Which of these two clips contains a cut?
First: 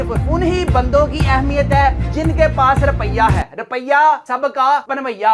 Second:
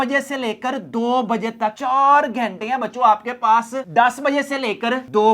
second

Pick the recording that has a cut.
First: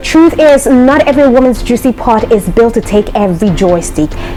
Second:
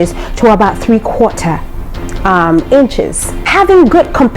second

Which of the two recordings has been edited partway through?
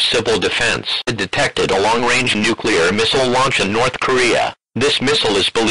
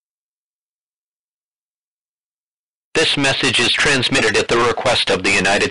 first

